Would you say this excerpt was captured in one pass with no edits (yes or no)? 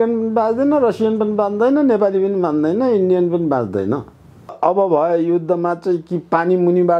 no